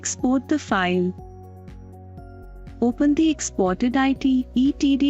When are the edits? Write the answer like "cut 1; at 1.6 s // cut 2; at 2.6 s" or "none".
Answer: cut 1; at 1.2 s // cut 2; at 2.8 s